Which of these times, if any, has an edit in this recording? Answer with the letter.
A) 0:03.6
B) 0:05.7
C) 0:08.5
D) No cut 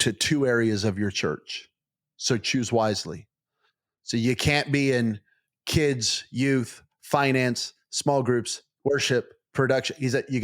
A